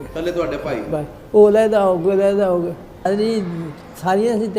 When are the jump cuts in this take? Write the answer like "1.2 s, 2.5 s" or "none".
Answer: 3.1 s